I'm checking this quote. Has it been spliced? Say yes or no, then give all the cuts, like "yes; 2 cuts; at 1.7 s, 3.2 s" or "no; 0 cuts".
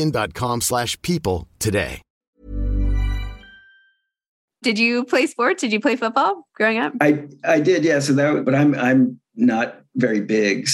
no; 0 cuts